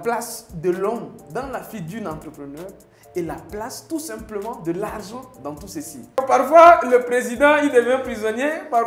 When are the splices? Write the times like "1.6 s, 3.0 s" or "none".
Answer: 6.0 s

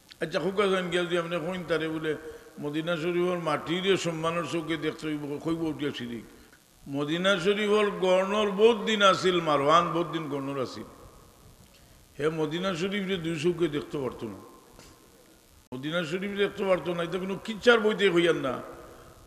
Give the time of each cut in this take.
6.4 s

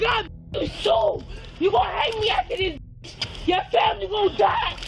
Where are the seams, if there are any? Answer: none

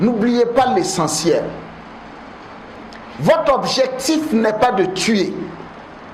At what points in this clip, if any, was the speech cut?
none

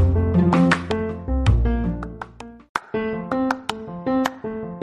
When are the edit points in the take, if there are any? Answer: 2.5 s

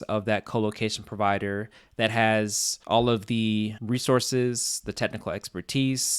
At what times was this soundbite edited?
none

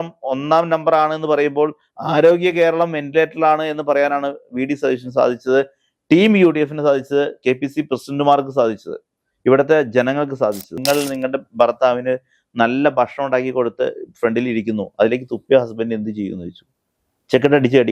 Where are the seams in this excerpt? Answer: 10.7 s

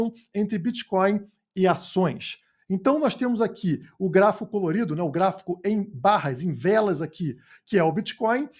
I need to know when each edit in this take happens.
none

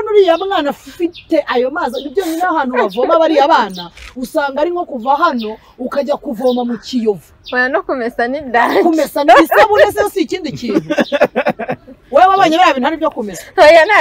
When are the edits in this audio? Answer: none

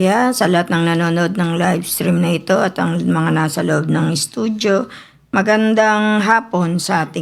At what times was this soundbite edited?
none

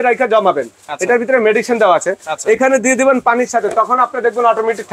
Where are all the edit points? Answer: none

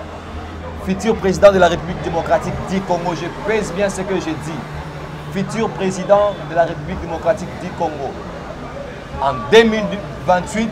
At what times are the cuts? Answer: none

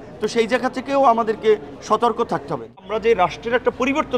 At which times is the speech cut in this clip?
2.9 s

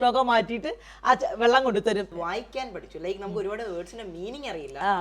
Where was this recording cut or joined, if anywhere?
2.1 s

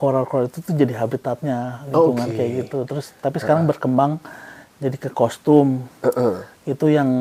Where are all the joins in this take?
none

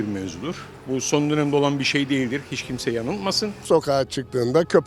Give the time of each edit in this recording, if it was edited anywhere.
3.6 s

